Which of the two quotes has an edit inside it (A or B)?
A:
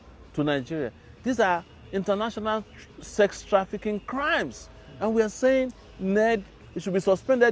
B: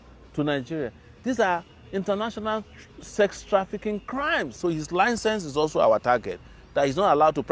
B